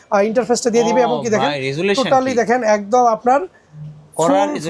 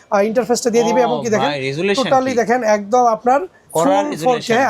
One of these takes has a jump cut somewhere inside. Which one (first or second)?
second